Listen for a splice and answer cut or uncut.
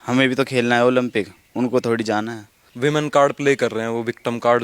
cut